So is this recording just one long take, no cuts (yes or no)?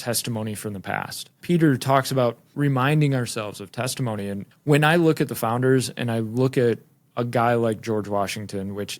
no